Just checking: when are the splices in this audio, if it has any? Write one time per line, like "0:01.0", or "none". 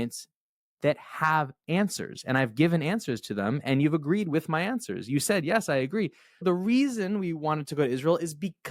0:06.4